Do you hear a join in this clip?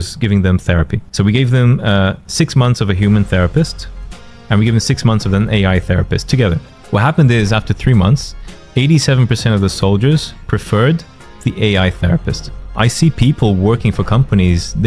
yes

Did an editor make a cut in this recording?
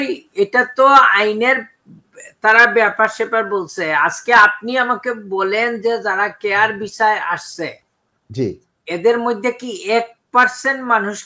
no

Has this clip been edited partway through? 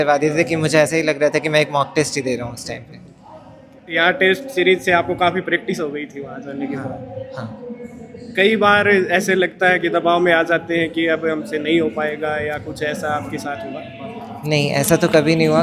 no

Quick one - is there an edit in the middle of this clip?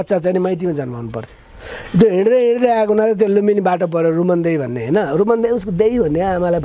no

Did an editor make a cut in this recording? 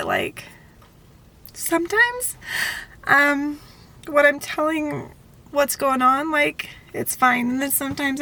no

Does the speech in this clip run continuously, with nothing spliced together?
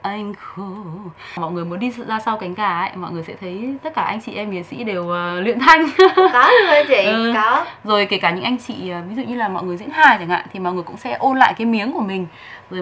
no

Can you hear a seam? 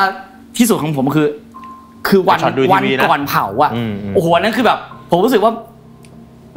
no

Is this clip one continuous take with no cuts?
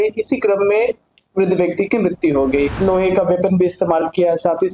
no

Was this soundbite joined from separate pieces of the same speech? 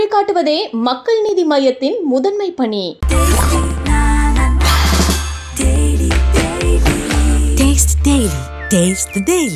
no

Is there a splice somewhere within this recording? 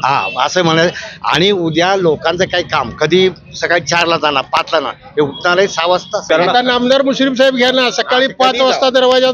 yes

